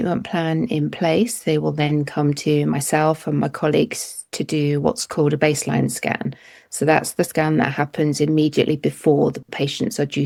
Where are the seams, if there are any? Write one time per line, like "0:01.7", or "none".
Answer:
none